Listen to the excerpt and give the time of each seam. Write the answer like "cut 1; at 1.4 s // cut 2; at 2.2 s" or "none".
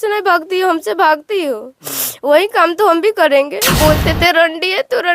cut 1; at 3.7 s